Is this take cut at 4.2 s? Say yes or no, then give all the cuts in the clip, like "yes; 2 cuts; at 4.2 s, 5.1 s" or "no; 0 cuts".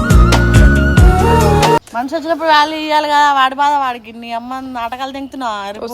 no; 1 cut; at 1.9 s